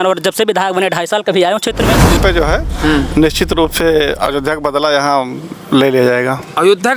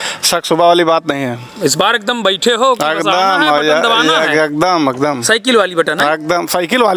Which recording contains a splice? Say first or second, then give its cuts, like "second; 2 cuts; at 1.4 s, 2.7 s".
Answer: first; 1 cut; at 2.2 s